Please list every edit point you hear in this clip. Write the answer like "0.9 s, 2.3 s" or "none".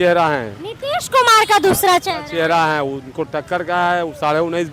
none